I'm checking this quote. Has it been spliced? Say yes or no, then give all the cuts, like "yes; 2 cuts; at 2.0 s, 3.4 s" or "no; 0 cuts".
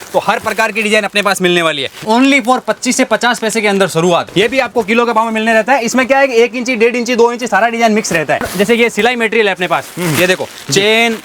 yes; 3 cuts; at 2.0 s, 4.3 s, 8.5 s